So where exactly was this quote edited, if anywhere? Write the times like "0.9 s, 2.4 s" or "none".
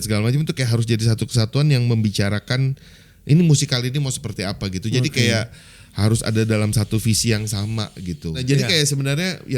8.4 s